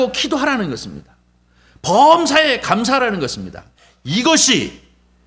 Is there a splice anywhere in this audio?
yes; 1 cut; at 3.7 s

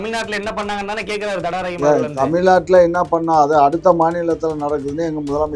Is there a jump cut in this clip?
no; 0 cuts

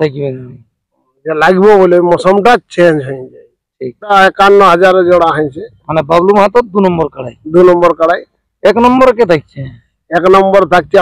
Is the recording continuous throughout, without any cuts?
no; 1 cut; at 4.1 s

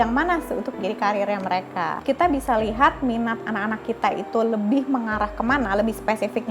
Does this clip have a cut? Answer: yes; 1 cut; at 2.0 s

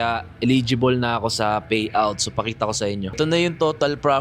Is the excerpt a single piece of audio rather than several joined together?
no; 1 cut; at 3.2 s

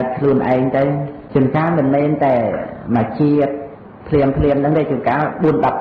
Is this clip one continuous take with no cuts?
no; 1 cut; at 1.1 s

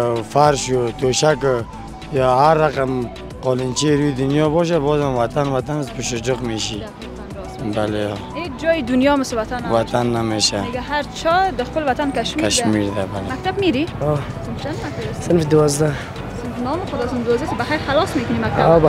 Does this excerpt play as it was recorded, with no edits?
no; 1 cut; at 13.3 s

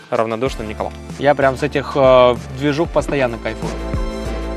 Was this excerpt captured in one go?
no; 2 cuts; at 0.9 s, 3.7 s

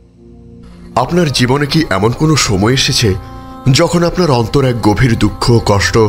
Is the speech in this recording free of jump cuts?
no; 1 cut; at 1.0 s

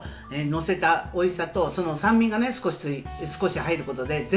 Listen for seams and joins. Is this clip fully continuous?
yes; 0 cuts

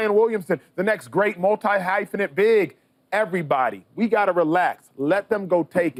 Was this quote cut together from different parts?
no; 0 cuts

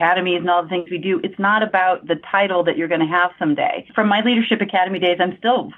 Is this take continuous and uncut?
no; 1 cut; at 3.9 s

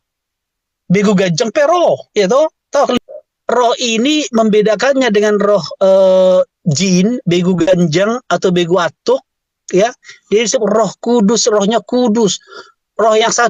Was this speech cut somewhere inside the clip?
yes; 1 cut; at 3.0 s

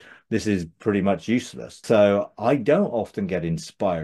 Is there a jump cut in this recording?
yes; 1 cut; at 1.8 s

